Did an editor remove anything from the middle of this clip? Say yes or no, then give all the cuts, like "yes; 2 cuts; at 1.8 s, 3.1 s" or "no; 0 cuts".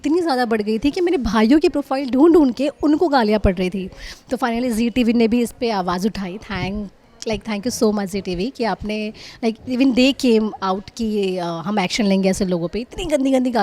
no; 0 cuts